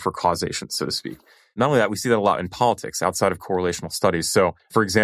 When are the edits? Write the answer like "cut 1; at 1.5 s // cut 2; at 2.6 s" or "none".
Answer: none